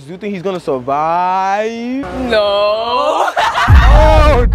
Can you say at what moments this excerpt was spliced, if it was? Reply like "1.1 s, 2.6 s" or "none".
none